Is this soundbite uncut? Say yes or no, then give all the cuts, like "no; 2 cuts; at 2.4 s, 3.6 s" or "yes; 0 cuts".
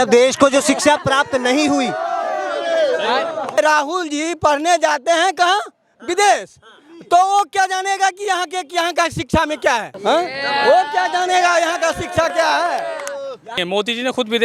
no; 3 cuts; at 3.6 s, 9.9 s, 13.6 s